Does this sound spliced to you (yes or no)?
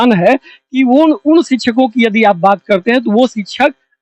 no